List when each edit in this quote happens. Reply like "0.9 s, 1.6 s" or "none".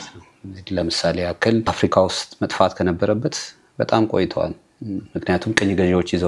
1.7 s

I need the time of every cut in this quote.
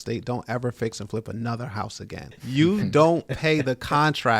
2.3 s

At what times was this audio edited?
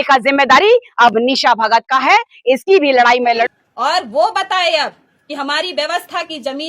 3.5 s

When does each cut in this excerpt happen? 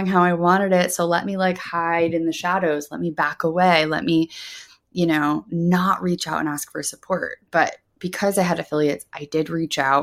none

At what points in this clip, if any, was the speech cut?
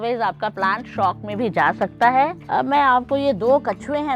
2.4 s

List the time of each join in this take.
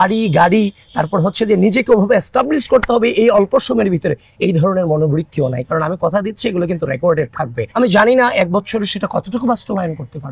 none

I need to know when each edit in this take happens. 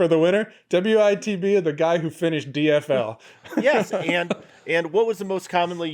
none

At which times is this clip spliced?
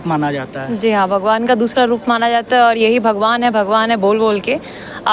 none

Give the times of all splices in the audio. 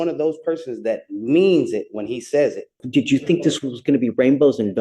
2.8 s

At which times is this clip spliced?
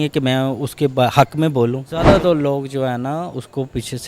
2.0 s

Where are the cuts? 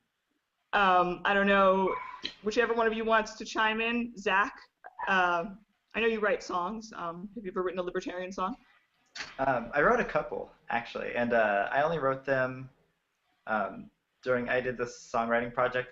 7.8 s

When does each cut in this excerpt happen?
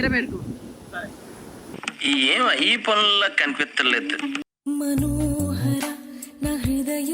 4.4 s

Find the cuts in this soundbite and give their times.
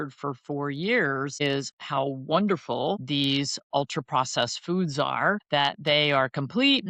1.4 s, 3.0 s, 5.4 s

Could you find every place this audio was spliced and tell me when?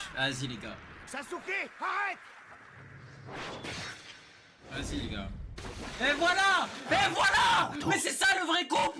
0.9 s

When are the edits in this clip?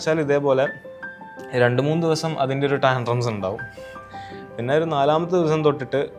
none

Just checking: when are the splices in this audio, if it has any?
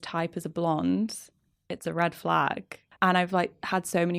2.8 s

